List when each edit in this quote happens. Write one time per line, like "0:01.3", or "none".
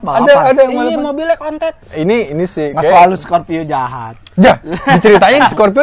0:01.8

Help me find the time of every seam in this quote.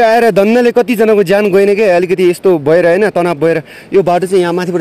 none

